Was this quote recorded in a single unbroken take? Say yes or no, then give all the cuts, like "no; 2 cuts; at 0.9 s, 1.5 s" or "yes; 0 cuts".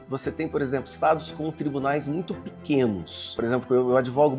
no; 1 cut; at 3.2 s